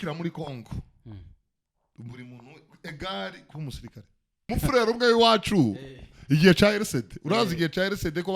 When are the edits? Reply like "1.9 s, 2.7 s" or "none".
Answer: 4.5 s